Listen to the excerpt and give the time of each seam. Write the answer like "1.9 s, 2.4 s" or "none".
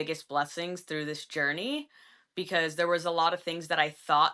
none